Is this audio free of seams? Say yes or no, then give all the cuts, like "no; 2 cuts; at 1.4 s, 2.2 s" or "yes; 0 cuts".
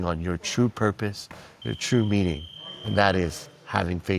yes; 0 cuts